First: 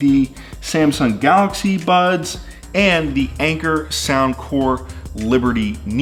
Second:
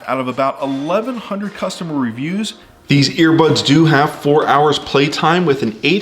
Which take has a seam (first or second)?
second